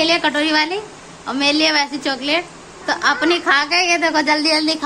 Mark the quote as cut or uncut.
uncut